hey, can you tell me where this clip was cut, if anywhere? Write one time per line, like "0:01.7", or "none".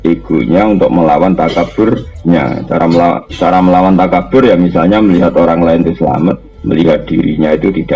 0:02.1
0:06.5